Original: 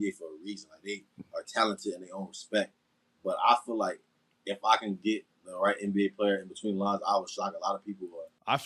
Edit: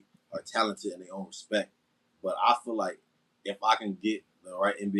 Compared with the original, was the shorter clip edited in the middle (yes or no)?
no